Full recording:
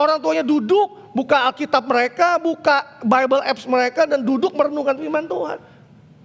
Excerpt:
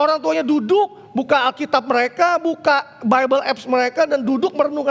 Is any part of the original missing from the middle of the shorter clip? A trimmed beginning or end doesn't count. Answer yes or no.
no